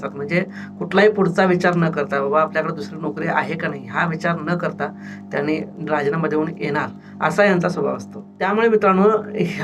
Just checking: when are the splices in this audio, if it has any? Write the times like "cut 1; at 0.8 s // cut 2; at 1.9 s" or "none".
cut 1; at 7.0 s // cut 2; at 8.5 s